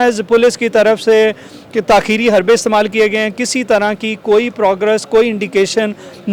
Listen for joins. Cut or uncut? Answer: uncut